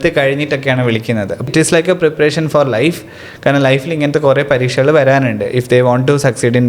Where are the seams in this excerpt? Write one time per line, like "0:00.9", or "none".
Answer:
0:01.5

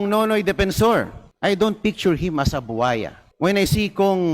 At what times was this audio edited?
0:01.2
0:03.2

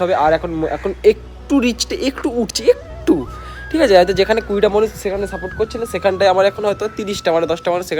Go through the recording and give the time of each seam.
none

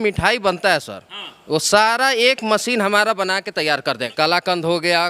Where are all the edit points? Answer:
0:04.1

